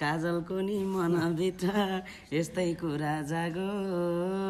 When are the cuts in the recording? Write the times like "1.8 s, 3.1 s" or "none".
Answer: none